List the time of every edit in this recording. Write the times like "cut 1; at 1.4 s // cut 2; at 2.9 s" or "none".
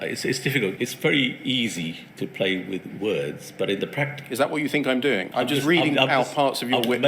cut 1; at 0.7 s // cut 2; at 5.3 s